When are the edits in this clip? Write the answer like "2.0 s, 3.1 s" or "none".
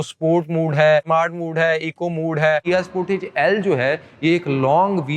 1.1 s, 2.6 s